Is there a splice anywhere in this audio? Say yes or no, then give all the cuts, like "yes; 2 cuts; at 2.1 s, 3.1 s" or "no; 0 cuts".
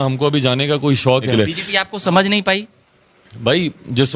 yes; 1 cut; at 1.3 s